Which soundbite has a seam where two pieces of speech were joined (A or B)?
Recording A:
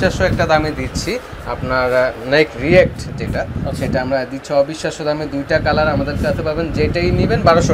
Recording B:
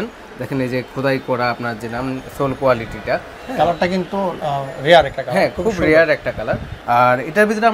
B